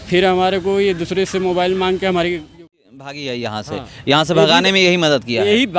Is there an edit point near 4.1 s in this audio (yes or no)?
no